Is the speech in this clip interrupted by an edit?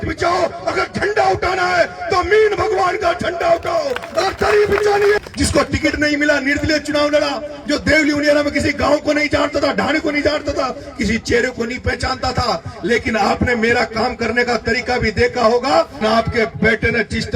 yes; 2 cuts; at 5.2 s, 16.0 s

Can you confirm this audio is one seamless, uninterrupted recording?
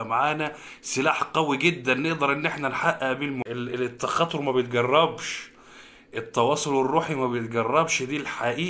no; 1 cut; at 3.4 s

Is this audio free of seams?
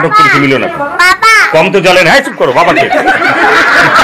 yes; 0 cuts

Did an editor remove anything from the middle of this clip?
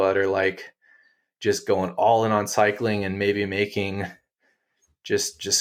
no; 0 cuts

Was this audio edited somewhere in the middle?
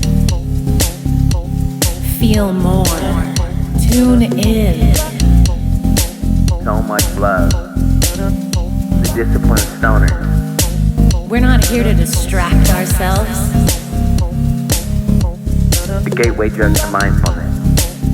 yes; 2 cuts; at 3.7 s, 9.1 s

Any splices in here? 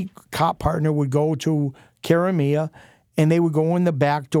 no; 0 cuts

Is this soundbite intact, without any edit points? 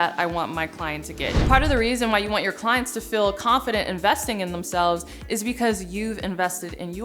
no; 1 cut; at 1.5 s

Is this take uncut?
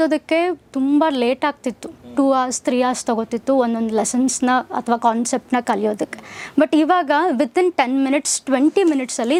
yes; 0 cuts

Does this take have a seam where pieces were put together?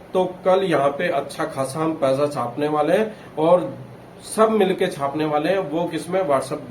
no; 0 cuts

